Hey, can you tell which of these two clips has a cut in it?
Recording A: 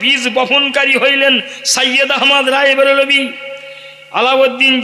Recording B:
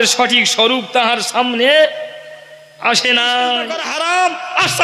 B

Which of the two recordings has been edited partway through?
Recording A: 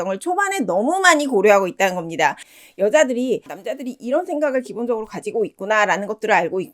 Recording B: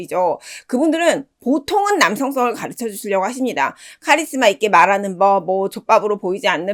A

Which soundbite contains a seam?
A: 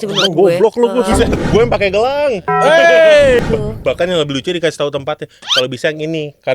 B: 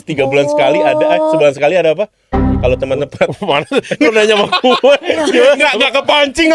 A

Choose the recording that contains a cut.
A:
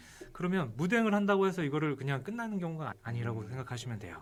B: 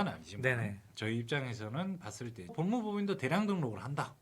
B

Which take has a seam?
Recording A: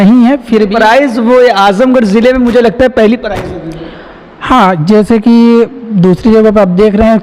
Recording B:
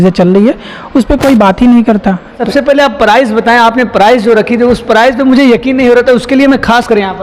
B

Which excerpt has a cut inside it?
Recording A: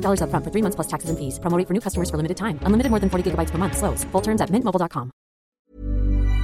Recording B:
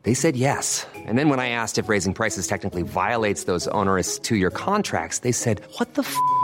A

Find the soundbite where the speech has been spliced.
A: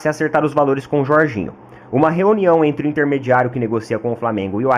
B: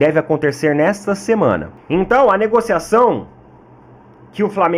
B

